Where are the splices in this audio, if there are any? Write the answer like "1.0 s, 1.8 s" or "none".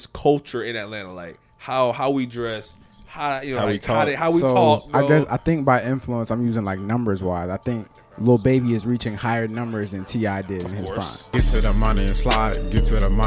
11.2 s

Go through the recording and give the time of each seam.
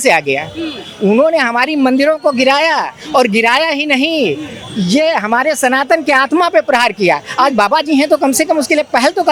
none

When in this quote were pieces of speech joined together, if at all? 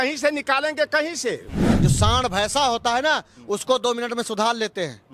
1.7 s

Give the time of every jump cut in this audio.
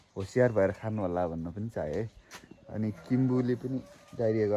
none

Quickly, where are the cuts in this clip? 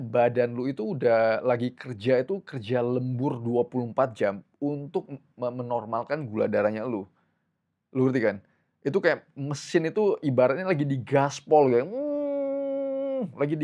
none

